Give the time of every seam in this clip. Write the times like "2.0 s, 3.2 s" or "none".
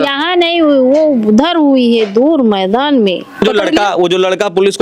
3.4 s